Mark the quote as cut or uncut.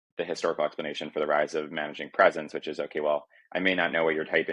uncut